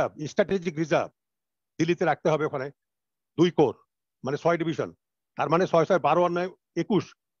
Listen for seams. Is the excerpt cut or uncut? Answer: uncut